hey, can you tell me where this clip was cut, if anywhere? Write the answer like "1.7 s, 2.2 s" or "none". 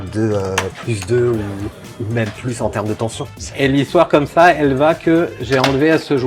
3.4 s